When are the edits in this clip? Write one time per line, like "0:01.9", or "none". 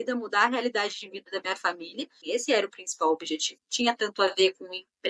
0:02.2
0:03.6